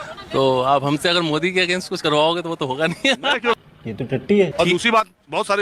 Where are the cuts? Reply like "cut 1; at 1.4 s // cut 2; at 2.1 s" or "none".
cut 1; at 4.5 s